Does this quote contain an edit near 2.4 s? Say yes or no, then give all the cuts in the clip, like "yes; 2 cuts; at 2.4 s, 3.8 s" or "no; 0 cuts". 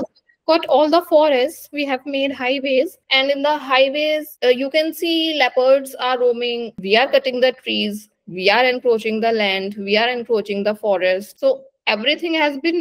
no; 1 cut; at 6.7 s